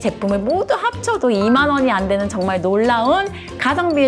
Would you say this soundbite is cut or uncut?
uncut